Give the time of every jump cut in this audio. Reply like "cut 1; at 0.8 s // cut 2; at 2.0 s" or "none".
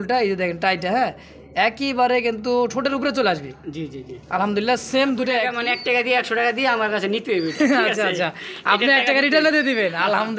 cut 1; at 5.5 s